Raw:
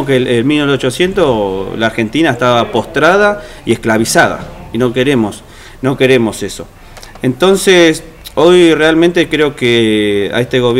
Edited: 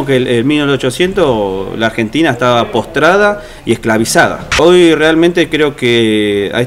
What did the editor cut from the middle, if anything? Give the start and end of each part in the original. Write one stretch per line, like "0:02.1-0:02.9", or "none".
0:04.4-0:08.2